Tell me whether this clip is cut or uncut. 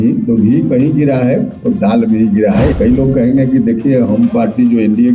cut